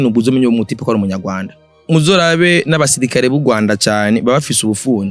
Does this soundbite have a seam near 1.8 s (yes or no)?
yes